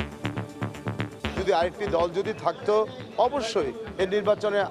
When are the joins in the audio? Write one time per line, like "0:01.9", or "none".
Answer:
0:01.5